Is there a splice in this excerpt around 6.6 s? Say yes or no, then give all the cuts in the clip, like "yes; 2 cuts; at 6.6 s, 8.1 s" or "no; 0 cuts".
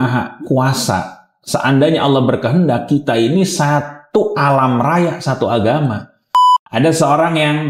yes; 1 cut; at 6.6 s